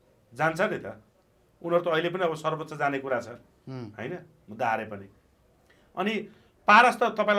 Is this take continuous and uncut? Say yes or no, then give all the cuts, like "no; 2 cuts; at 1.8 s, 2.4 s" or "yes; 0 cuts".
yes; 0 cuts